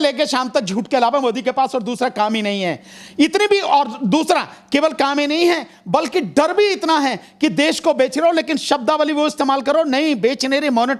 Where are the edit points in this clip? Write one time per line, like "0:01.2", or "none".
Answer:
none